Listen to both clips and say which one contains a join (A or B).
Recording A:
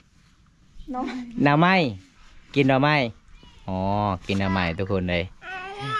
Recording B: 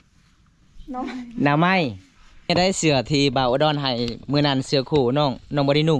B